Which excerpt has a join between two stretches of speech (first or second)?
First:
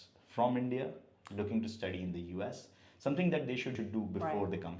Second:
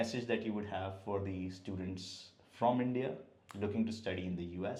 first